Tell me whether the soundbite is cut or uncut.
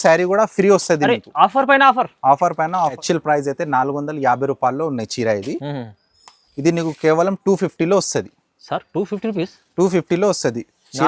cut